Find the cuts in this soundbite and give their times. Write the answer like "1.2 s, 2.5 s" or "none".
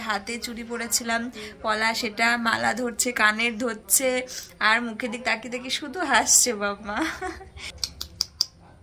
7.8 s